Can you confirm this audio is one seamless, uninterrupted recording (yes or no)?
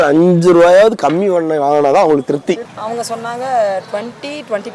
no